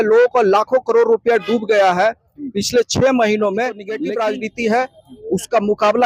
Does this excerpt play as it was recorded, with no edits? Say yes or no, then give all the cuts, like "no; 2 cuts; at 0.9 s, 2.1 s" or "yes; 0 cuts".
no; 1 cut; at 3.9 s